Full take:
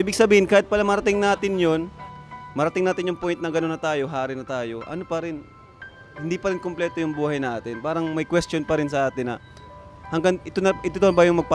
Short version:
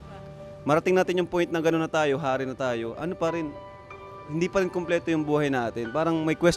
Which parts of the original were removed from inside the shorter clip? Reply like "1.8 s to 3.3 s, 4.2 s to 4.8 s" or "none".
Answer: none